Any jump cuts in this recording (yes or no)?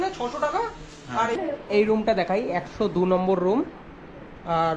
yes